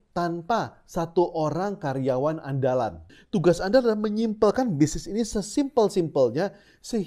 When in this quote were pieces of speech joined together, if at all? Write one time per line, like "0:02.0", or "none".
0:03.0